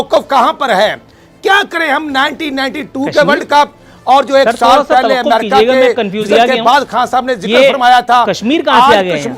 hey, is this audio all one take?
yes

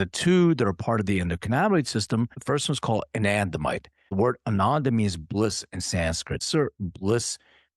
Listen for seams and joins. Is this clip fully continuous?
no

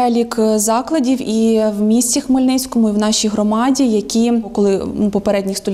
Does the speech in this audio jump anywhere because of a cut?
no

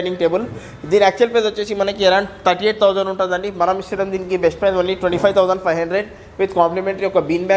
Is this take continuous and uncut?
yes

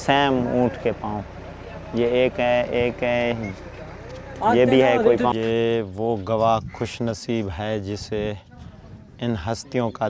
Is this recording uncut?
no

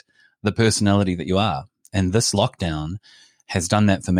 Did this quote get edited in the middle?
no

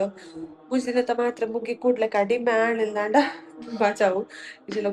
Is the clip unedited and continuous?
yes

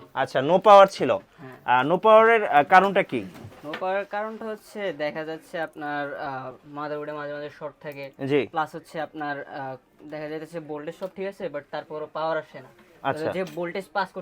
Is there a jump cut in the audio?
no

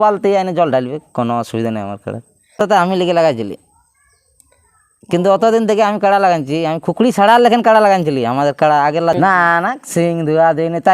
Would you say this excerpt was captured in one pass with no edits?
no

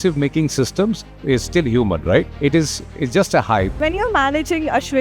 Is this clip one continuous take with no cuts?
no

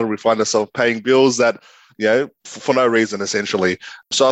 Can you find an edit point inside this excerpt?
no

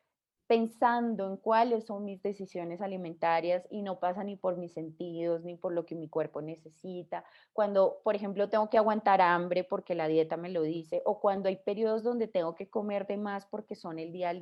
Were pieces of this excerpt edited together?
no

